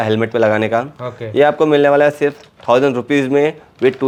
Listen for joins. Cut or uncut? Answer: uncut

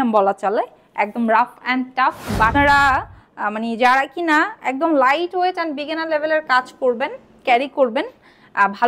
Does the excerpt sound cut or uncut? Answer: cut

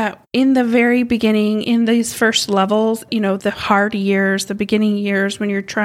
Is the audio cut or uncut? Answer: uncut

